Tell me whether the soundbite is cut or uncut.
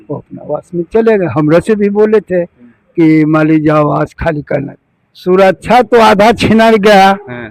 cut